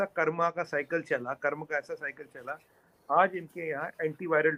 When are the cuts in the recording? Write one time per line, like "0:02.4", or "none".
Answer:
none